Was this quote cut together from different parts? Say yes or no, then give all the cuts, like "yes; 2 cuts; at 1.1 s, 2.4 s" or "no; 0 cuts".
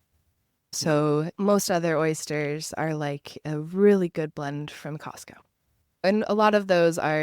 yes; 3 cuts; at 0.8 s, 1.3 s, 6.1 s